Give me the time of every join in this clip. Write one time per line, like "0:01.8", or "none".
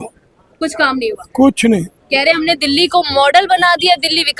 none